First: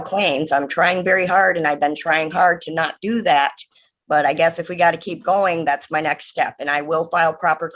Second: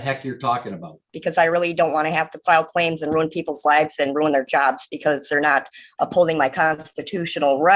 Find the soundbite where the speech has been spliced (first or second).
second